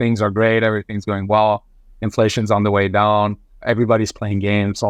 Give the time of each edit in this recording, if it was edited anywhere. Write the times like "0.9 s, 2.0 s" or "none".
none

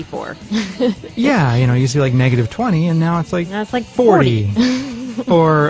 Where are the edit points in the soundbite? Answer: 4.7 s

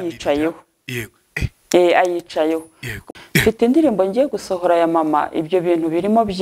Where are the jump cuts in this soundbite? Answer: 3.0 s

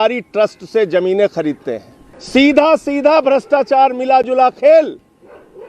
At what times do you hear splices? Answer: none

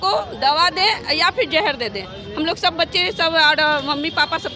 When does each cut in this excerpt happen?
none

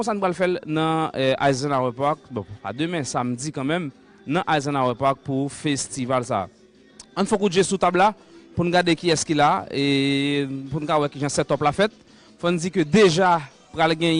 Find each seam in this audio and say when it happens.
none

